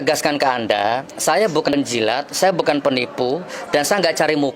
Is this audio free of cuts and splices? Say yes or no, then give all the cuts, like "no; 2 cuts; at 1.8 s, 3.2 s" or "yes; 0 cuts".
no; 1 cut; at 1.7 s